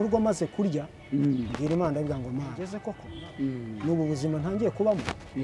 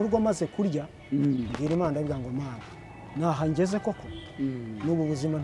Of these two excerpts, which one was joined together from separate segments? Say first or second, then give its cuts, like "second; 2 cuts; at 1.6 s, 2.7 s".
first; 1 cut; at 2.8 s